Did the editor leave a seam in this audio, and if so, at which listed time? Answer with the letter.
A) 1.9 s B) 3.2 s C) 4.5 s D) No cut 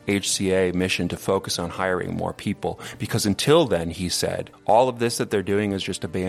C